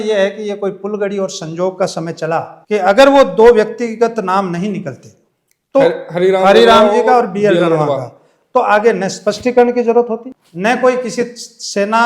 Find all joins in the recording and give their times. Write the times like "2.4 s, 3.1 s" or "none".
none